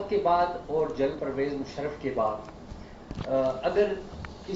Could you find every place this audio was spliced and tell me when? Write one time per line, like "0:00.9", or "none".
0:01.2